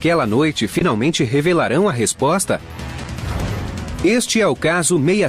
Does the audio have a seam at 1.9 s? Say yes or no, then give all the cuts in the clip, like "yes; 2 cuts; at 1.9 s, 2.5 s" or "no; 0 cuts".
yes; 1 cut; at 1.9 s